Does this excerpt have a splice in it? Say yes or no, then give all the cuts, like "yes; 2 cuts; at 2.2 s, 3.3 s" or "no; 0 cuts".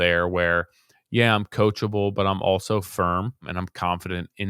yes; 1 cut; at 3.6 s